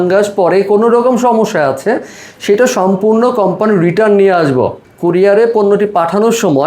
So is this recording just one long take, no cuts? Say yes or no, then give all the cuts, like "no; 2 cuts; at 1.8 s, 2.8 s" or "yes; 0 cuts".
no; 1 cut; at 4.9 s